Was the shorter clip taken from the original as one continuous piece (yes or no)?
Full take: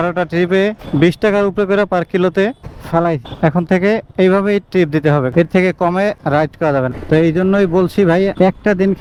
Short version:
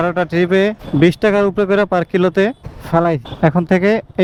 yes